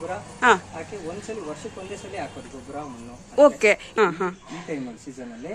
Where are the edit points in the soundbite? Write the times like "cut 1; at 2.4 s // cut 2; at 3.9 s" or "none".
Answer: cut 1; at 3.9 s

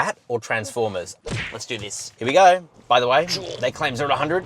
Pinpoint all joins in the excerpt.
cut 1; at 1.2 s // cut 2; at 2.7 s

